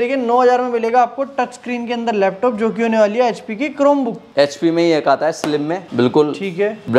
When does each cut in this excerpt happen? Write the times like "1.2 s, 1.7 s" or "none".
none